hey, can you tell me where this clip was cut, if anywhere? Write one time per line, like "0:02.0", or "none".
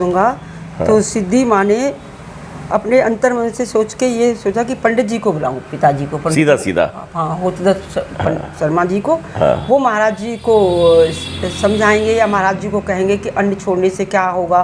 none